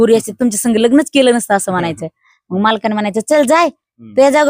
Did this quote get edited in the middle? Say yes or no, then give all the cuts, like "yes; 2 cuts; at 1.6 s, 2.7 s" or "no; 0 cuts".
no; 0 cuts